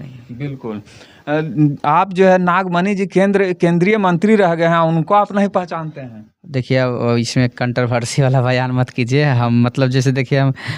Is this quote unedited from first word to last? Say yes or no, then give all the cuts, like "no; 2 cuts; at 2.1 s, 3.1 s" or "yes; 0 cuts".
yes; 0 cuts